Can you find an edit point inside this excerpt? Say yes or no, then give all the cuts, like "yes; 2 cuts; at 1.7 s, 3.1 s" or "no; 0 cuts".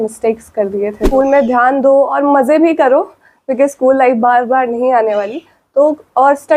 yes; 1 cut; at 1.0 s